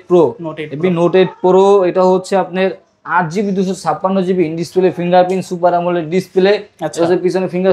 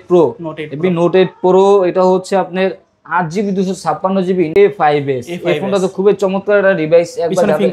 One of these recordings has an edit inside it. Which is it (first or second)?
second